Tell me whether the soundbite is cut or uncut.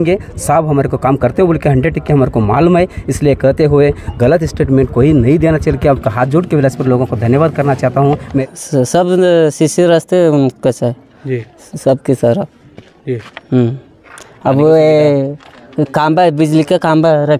cut